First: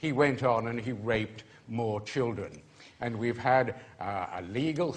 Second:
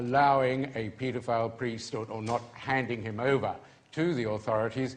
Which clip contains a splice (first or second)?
second